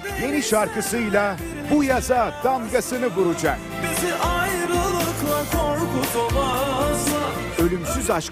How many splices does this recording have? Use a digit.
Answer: 0